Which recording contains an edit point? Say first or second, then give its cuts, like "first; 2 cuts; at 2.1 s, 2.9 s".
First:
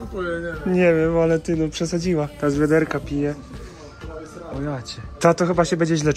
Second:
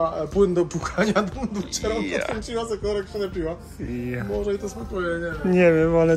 first; 2 cuts; at 2.3 s, 5.0 s